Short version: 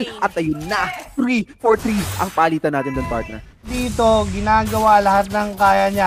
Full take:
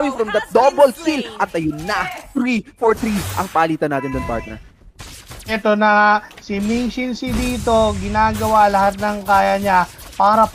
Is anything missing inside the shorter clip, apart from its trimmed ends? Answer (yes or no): yes